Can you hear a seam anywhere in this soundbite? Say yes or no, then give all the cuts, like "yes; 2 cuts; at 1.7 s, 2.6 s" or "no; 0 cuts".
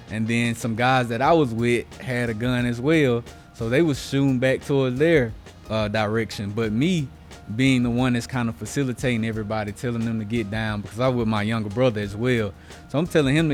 no; 0 cuts